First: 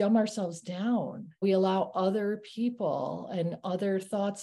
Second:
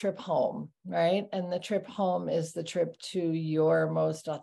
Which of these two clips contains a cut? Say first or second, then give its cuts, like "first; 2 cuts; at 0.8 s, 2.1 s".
first; 1 cut; at 1.4 s